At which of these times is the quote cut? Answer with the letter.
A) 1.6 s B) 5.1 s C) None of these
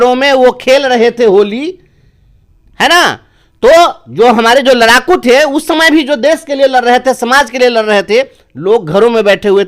C